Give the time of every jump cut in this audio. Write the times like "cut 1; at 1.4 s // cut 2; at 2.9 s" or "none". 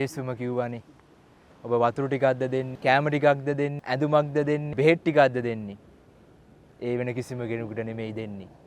cut 1; at 2.7 s // cut 2; at 3.8 s // cut 3; at 4.7 s